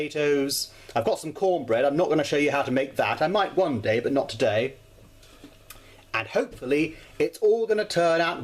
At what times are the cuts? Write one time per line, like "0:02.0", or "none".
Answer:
none